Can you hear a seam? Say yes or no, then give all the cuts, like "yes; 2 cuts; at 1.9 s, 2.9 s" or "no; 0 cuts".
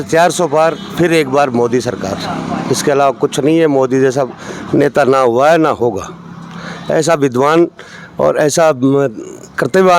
no; 0 cuts